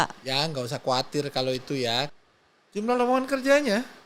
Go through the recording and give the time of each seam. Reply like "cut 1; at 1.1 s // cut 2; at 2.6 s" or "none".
cut 1; at 2.1 s